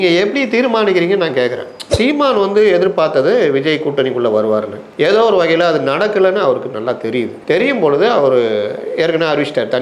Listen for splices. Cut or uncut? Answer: cut